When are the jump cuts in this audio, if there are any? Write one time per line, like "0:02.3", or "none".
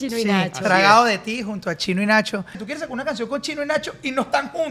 0:02.6

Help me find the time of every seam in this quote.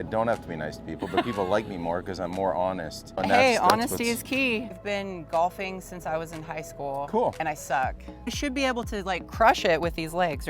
0:03.2
0:04.7
0:08.4

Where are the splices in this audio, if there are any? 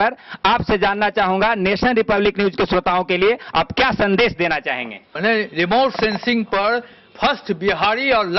0:05.1

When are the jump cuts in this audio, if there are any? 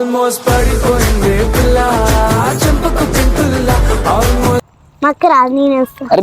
0:04.6

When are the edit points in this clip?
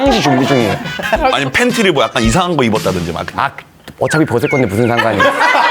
0:01.2

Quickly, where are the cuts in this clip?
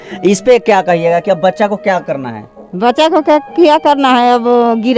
none

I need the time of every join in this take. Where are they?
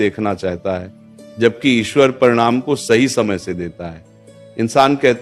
none

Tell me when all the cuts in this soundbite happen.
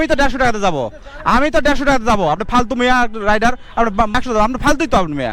0:04.2

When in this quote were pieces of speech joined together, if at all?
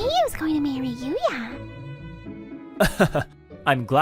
0:01.6

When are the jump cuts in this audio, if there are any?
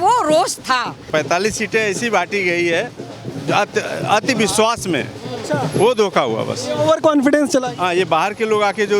0:01.1

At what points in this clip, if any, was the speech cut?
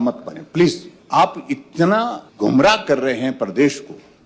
0:00.9
0:02.2

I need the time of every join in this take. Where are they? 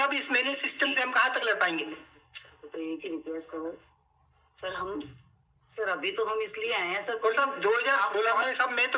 none

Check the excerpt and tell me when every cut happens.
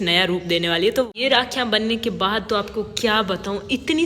0:01.1

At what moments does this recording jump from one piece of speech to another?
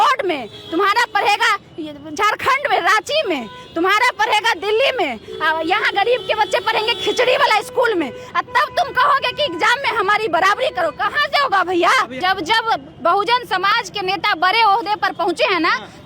0:12.1

